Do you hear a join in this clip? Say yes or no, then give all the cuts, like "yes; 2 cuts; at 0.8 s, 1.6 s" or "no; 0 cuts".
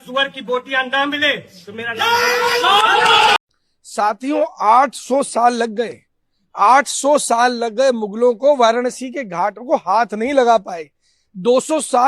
yes; 1 cut; at 3.4 s